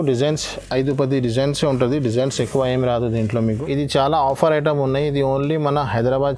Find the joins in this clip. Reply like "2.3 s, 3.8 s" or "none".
3.4 s